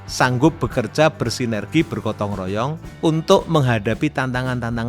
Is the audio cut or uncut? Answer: cut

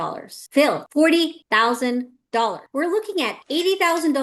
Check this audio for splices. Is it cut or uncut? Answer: uncut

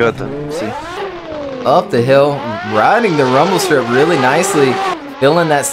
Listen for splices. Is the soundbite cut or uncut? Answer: cut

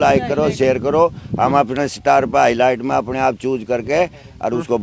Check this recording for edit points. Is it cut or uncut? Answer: uncut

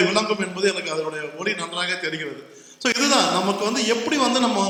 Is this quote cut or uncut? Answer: uncut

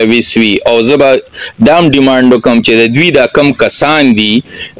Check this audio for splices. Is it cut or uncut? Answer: uncut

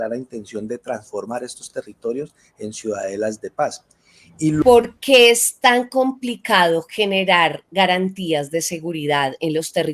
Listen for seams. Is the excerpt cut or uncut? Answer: cut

